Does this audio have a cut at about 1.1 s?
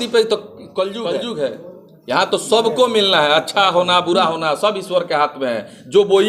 yes; 1 cut; at 1.1 s

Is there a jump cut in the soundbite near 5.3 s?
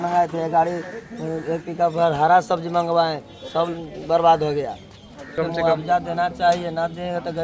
yes; 1 cut; at 5.3 s

